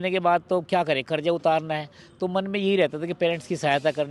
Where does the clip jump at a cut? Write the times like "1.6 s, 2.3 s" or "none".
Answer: none